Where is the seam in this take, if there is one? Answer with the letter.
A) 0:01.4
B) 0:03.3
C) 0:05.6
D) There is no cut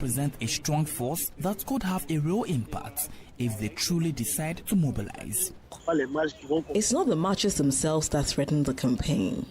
C